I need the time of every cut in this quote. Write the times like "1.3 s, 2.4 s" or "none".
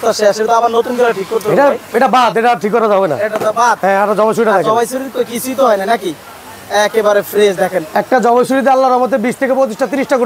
none